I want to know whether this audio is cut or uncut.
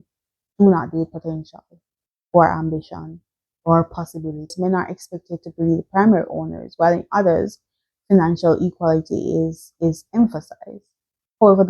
cut